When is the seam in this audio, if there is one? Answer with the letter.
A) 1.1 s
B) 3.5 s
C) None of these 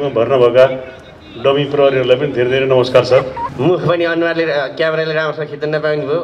B